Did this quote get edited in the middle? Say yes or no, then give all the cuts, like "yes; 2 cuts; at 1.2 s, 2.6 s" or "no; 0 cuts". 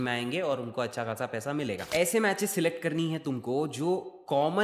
yes; 1 cut; at 1.8 s